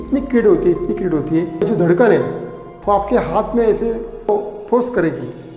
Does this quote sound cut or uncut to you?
cut